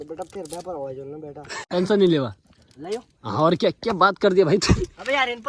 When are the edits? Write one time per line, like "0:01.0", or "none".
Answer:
0:01.6